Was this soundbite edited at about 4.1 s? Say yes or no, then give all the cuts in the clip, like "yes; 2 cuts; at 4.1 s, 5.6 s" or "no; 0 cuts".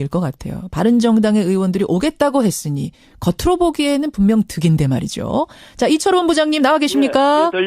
yes; 1 cut; at 4.1 s